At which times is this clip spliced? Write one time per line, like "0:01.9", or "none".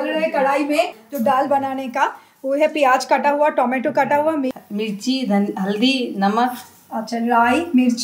0:01.0
0:04.5